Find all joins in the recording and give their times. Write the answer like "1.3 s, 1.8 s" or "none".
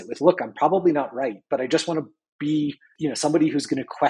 none